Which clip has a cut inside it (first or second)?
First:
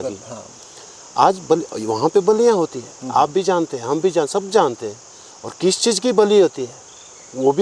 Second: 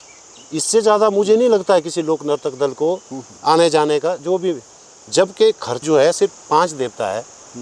second